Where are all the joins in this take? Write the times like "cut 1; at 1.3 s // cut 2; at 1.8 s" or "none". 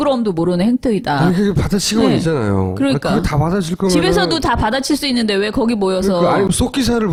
none